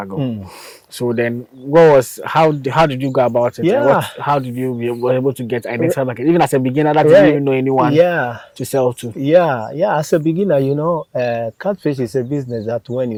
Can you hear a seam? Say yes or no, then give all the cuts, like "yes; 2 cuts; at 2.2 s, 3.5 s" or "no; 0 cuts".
no; 0 cuts